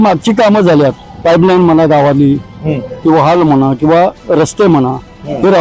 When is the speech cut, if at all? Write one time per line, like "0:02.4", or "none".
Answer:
0:01.1